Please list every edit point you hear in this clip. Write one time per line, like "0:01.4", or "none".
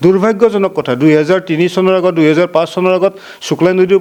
none